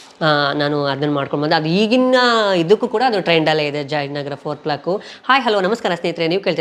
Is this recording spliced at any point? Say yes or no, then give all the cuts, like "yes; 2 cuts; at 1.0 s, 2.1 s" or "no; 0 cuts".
yes; 1 cut; at 5.1 s